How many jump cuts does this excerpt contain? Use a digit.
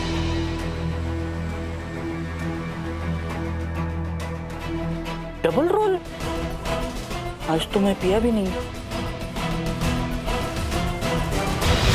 2